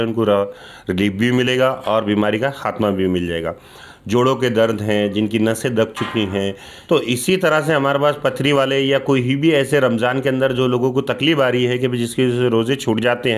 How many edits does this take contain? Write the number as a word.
one